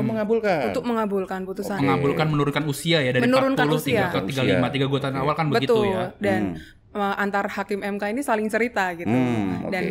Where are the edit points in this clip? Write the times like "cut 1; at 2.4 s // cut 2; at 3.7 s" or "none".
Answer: none